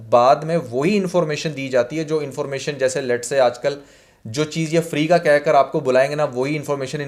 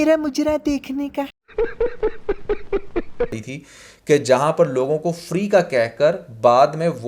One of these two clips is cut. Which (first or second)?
second